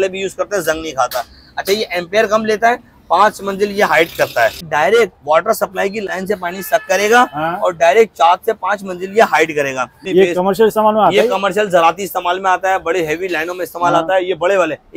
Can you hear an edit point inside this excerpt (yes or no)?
yes